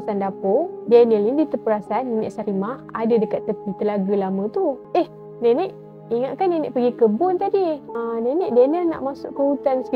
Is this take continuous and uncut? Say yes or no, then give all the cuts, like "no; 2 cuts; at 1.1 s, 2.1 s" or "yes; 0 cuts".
no; 1 cut; at 4.8 s